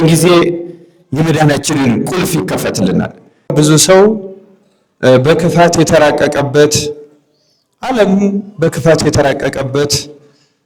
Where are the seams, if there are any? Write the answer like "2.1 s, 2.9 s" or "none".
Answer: 3.5 s